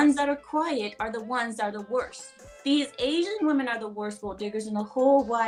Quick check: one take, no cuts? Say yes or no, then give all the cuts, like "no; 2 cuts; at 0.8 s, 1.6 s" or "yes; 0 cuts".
yes; 0 cuts